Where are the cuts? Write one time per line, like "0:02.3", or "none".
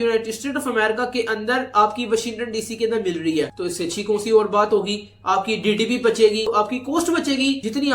none